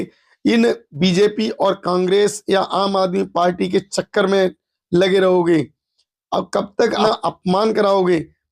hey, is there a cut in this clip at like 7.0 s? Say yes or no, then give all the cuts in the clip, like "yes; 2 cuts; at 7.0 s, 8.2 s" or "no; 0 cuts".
yes; 2 cuts; at 0.9 s, 7.0 s